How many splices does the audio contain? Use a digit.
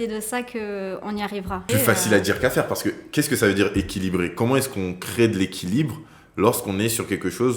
1